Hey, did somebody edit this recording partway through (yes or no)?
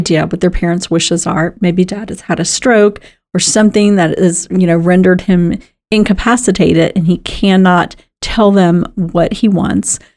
no